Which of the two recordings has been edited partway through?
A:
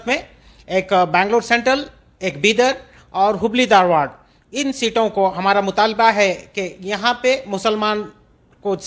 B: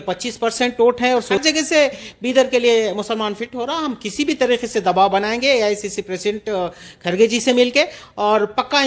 B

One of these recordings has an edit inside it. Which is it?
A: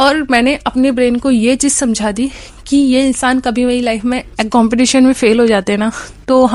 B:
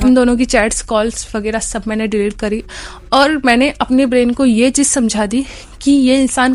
A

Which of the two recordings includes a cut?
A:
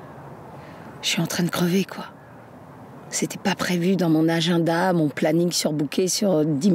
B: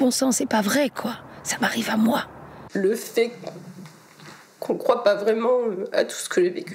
B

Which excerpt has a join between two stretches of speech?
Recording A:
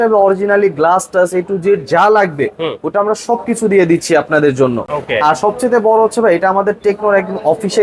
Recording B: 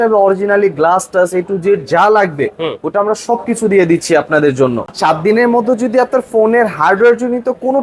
B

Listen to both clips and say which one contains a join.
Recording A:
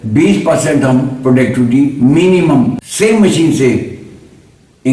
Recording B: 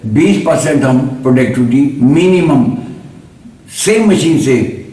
A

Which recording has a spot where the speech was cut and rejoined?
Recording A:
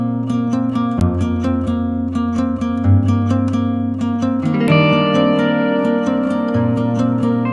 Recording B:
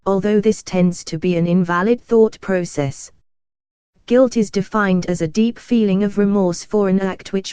A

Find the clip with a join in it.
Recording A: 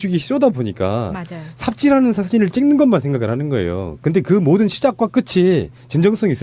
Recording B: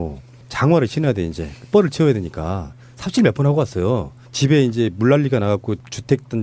B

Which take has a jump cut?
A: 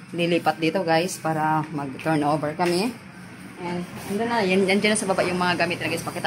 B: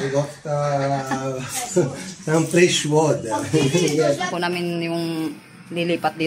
B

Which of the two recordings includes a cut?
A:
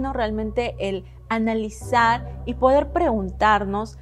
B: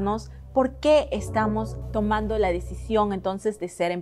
B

